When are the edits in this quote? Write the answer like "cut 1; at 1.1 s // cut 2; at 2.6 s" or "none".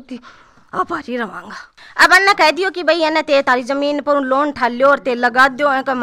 cut 1; at 1.7 s